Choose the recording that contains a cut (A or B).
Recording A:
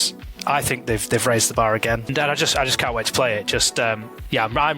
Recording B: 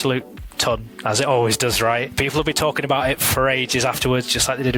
A